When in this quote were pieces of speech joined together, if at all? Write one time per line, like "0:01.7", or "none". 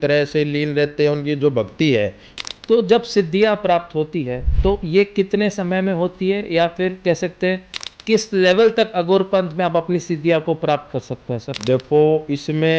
0:02.2